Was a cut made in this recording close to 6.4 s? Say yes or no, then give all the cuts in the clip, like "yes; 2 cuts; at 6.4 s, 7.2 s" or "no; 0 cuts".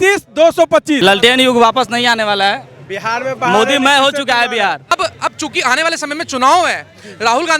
no; 2 cuts; at 1.0 s, 4.8 s